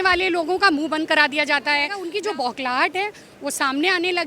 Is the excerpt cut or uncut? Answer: cut